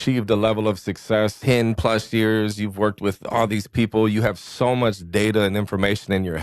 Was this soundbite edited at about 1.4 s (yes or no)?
yes